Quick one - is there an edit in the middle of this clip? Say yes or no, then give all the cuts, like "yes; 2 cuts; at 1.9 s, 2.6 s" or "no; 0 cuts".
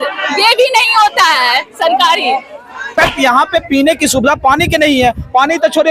yes; 1 cut; at 2.9 s